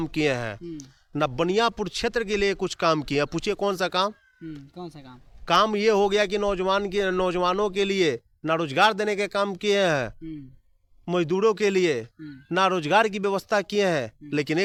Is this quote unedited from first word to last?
yes; 0 cuts

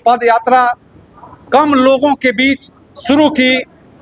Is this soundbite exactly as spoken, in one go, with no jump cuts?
yes; 0 cuts

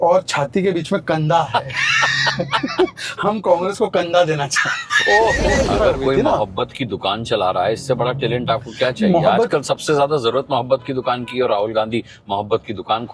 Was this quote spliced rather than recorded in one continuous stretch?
yes; 1 cut; at 5.6 s

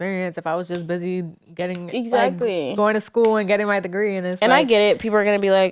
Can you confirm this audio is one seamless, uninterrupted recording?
yes; 0 cuts

